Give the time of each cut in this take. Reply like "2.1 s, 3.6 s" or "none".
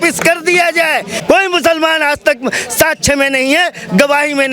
1.1 s